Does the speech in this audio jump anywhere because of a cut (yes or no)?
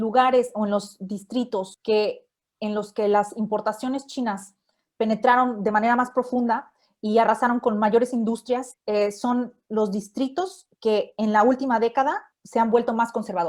yes